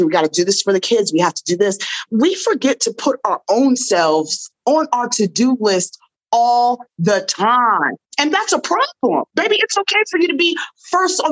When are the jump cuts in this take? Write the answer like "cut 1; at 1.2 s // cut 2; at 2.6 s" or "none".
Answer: cut 1; at 2.0 s // cut 2; at 7.9 s // cut 3; at 9.3 s